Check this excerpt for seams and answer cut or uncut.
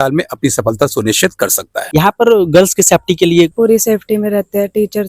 cut